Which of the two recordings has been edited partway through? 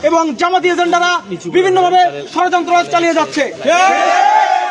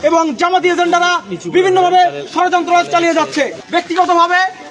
second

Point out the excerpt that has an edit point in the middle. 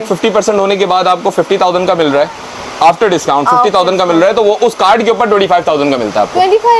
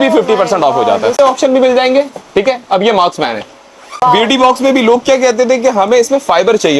second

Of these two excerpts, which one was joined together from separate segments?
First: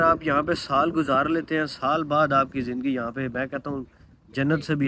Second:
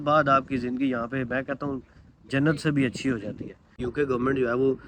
second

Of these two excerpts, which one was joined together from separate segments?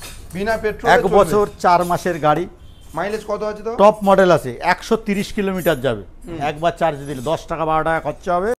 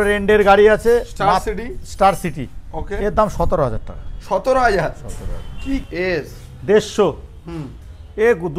second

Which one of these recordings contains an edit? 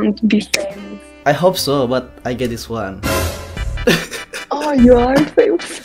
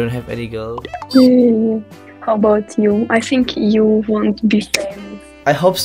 second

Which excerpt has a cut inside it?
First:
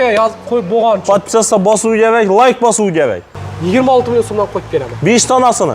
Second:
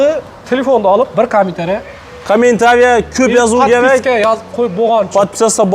first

